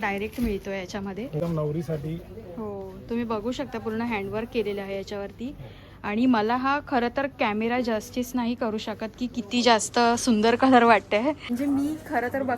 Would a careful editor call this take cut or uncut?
cut